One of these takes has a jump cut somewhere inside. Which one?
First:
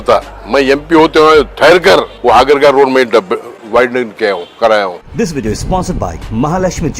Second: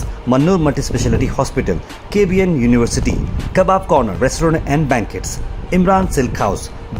first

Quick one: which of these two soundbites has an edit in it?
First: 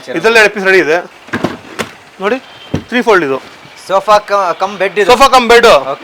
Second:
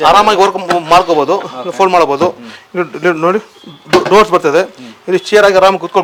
first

